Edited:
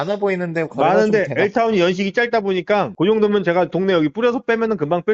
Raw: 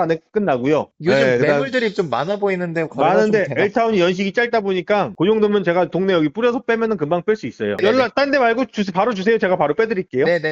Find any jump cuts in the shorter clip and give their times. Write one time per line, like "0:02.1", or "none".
none